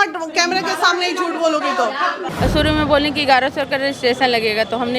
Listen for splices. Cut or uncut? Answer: cut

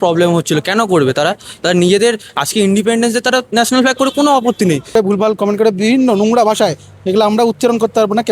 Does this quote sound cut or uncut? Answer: cut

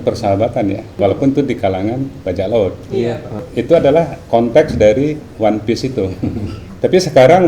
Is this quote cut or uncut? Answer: cut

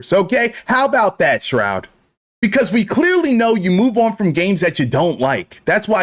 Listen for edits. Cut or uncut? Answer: cut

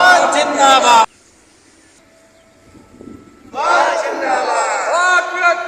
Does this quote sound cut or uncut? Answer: cut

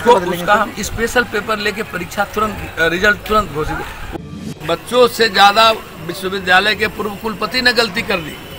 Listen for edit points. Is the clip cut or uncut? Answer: cut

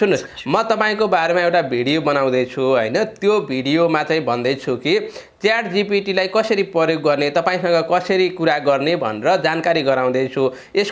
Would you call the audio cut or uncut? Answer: uncut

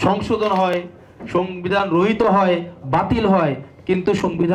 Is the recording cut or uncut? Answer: uncut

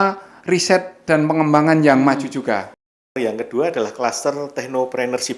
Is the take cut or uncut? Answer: cut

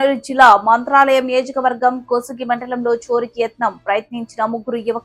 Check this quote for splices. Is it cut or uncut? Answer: uncut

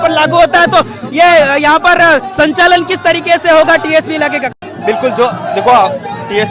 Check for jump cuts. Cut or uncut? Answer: uncut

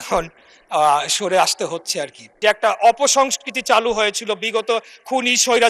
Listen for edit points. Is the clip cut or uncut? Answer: cut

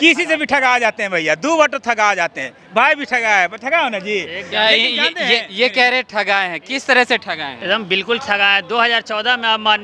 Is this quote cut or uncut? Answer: uncut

